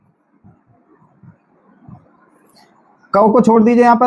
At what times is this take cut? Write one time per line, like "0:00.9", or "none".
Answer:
none